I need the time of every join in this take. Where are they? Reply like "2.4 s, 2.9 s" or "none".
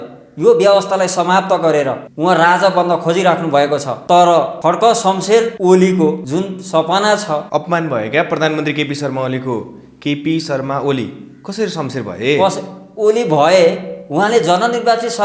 2.0 s, 3.9 s, 4.5 s, 5.5 s, 6.2 s, 7.4 s